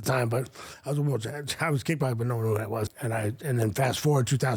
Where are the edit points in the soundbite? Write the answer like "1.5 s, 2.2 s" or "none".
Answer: 3.0 s

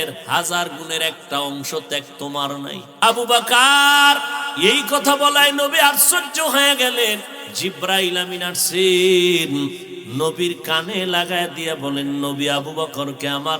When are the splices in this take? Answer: 2.9 s, 4.4 s, 7.4 s, 9.9 s

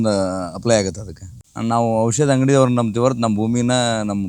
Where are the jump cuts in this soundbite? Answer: 1.5 s

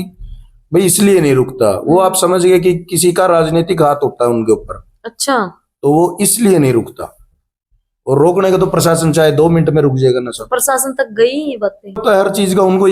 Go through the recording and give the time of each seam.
12.0 s

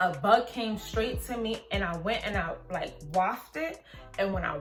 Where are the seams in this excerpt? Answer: none

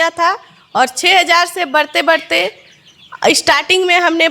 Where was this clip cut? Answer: none

